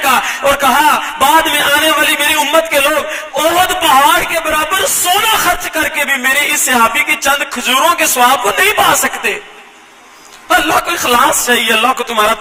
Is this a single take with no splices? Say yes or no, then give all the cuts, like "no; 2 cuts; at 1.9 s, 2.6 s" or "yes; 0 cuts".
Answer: yes; 0 cuts